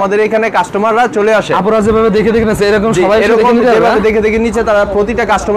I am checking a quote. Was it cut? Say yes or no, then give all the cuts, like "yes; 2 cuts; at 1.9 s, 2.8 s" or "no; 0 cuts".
no; 0 cuts